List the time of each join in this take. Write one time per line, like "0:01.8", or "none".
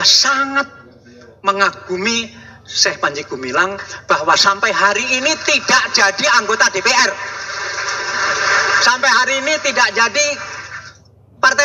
none